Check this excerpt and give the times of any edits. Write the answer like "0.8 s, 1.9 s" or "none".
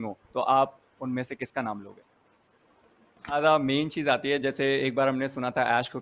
3.4 s

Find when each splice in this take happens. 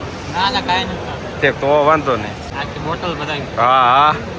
2.5 s

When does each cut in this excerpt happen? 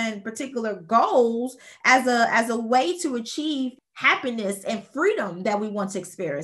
3.8 s

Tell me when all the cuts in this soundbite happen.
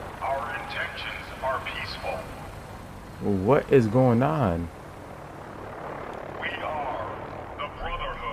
none

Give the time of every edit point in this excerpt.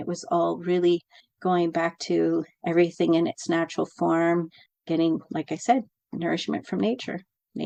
none

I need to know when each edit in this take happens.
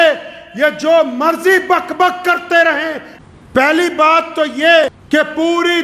3.1 s, 4.8 s

